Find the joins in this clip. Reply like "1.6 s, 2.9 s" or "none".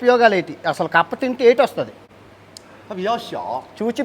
1.9 s